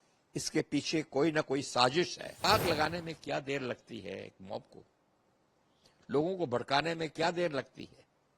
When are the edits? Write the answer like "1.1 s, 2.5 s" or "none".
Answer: 2.4 s